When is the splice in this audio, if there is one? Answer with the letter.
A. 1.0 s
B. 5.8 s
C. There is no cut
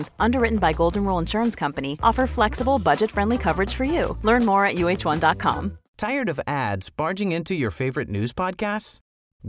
B